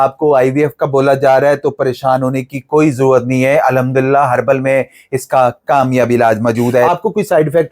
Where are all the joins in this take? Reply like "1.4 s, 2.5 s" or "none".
6.8 s